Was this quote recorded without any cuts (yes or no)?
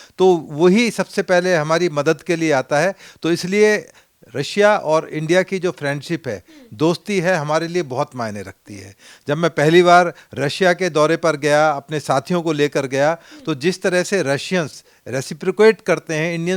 yes